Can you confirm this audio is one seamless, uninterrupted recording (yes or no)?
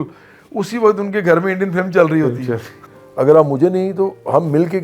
no